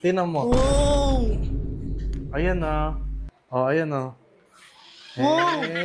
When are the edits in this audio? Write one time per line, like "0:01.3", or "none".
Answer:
none